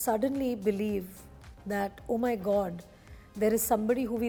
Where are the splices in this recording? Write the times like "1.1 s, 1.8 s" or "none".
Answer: none